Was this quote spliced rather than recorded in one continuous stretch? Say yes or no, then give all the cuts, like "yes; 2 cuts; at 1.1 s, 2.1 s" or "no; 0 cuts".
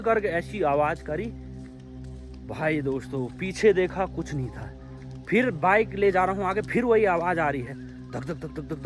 no; 0 cuts